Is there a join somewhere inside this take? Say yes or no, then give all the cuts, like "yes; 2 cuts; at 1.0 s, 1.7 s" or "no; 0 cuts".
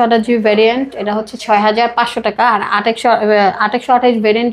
no; 0 cuts